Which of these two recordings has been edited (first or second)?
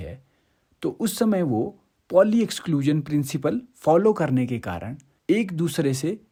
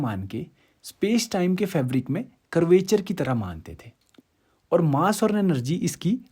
second